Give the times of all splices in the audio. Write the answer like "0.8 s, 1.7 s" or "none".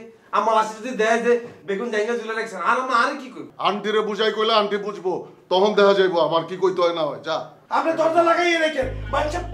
3.4 s